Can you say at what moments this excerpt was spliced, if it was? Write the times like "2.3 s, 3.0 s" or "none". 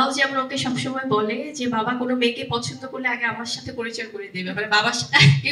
none